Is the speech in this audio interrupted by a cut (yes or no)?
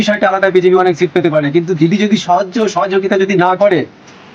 no